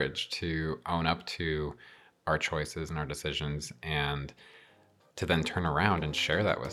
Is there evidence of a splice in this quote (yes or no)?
no